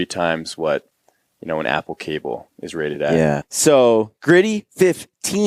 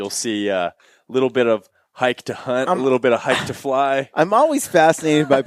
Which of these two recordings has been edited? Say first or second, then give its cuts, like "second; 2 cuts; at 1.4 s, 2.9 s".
first; 1 cut; at 3.5 s